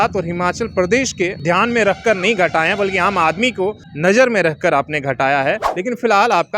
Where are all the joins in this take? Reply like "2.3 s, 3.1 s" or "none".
1.4 s, 3.9 s, 5.7 s